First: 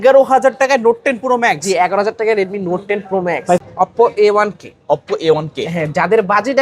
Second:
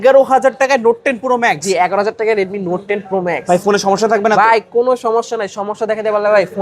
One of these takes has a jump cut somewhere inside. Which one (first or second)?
first